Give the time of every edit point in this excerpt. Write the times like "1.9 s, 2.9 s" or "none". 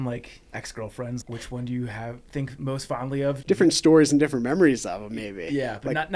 1.2 s, 3.4 s